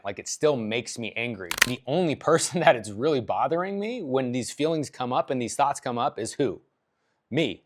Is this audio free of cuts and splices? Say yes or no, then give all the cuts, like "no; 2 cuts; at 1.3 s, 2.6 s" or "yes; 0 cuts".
no; 1 cut; at 1.7 s